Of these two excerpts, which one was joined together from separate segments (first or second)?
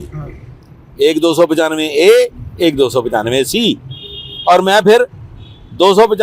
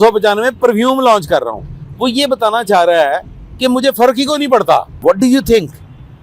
second